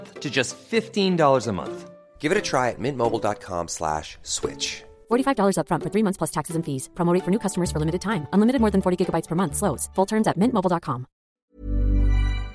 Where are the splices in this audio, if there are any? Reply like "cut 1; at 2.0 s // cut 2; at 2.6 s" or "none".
cut 1; at 11.4 s